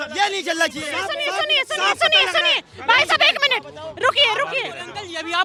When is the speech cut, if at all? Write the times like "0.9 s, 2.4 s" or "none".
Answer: none